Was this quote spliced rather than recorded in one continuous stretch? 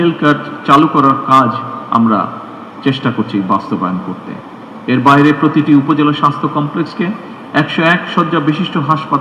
no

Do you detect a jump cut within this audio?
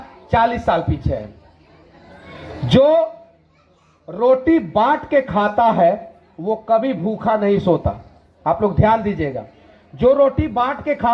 no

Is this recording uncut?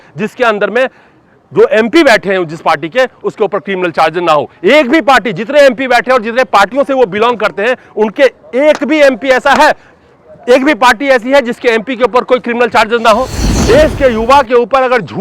no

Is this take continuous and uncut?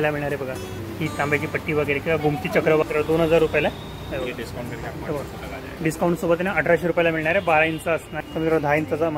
no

